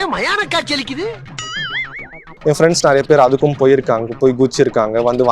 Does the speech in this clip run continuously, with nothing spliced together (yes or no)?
no